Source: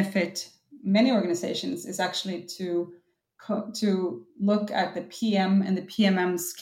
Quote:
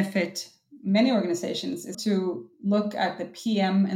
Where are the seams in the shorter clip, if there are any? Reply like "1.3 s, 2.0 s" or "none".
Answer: 1.9 s